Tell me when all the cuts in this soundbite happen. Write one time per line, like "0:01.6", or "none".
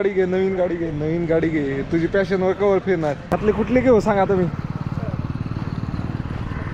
0:03.4

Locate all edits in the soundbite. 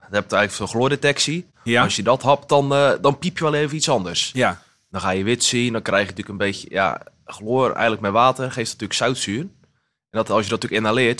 none

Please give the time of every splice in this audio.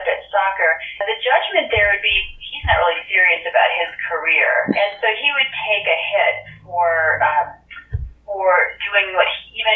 0:01.0

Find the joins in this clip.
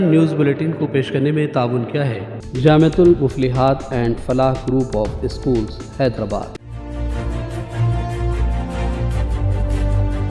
0:06.5

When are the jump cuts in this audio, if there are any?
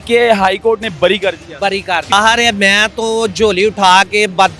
0:02.1

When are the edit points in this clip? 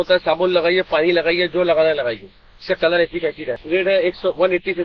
0:03.6

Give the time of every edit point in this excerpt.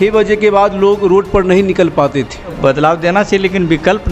0:02.6

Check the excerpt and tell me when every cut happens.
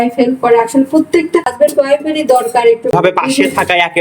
0:01.5
0:02.9

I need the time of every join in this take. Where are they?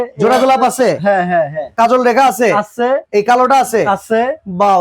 0:01.6
0:03.1

